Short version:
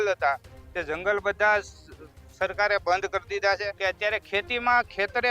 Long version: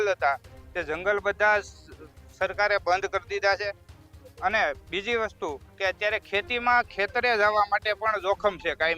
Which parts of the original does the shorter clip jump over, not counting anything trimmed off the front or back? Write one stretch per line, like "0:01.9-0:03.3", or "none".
0:03.7-0:05.7

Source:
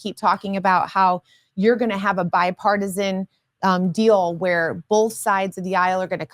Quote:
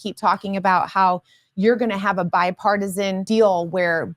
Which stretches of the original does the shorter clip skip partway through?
0:03.2-0:03.9

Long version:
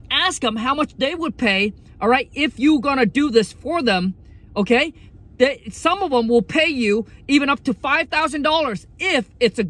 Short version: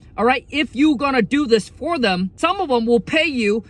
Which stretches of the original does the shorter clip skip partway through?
0:04.2-0:05.7

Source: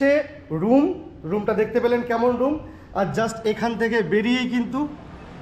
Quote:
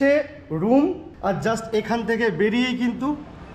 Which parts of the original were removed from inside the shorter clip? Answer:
0:01.1-0:02.8

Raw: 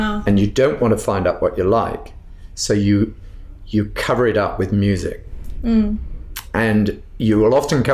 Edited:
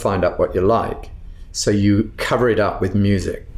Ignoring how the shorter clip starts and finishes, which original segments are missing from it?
0:03.2-0:04.0

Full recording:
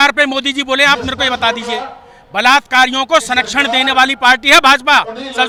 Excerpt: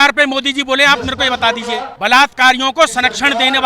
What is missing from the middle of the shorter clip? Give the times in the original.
0:01.9-0:02.2

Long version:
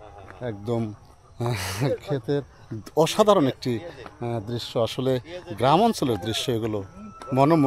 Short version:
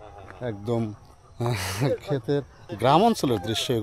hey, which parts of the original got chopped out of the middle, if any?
0:02.6-0:05.4

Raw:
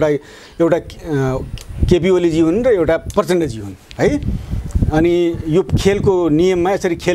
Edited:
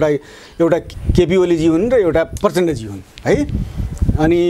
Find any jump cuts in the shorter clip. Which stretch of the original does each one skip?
0:01.0-0:01.7

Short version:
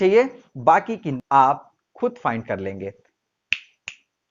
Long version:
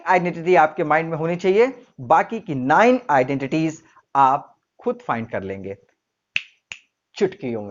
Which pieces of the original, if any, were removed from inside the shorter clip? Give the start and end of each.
0:02.5-0:03.9

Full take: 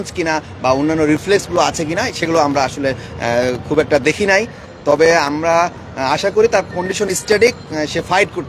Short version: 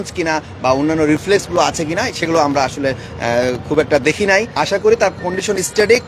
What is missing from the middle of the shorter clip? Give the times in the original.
0:04.5-0:06.1

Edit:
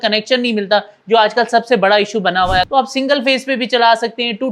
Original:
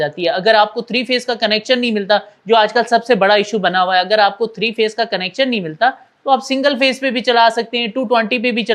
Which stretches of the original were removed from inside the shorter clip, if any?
0:04.1-0:06.2

